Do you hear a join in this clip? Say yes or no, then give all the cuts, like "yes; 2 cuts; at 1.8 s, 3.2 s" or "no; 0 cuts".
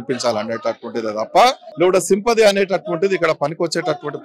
yes; 1 cut; at 1.7 s